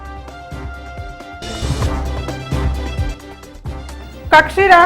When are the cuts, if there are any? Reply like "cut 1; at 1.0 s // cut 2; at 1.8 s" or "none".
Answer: cut 1; at 3.9 s